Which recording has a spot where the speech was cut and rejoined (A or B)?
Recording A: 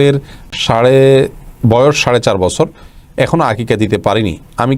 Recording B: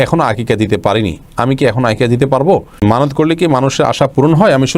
B